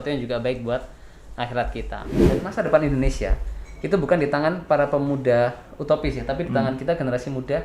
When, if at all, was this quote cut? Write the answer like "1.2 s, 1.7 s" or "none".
2.2 s